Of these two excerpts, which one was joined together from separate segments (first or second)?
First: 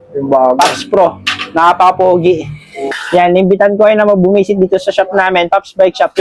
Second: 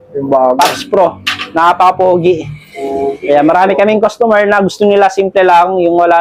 first